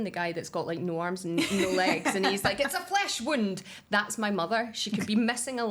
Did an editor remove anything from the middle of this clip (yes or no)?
no